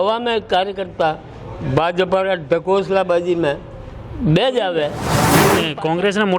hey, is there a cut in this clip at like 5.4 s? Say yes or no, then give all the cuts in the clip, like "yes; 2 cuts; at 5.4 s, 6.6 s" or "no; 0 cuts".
yes; 1 cut; at 5.4 s